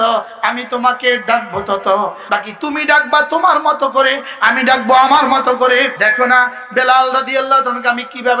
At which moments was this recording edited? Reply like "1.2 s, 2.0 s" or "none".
2.2 s, 5.9 s